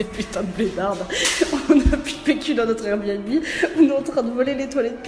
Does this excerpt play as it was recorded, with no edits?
yes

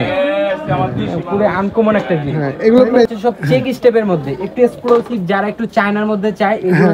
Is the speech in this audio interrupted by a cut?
yes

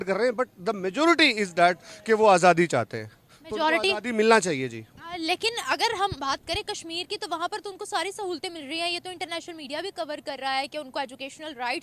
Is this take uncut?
yes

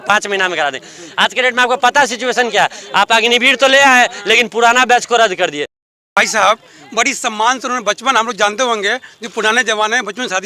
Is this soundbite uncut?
no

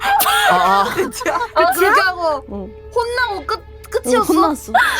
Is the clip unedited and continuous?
no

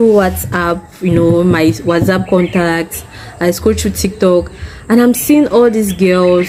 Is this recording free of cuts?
yes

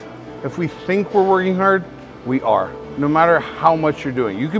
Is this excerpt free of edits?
no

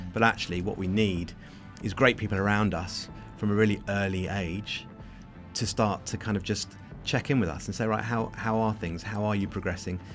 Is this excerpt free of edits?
yes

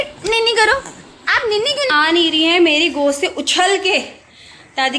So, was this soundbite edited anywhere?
yes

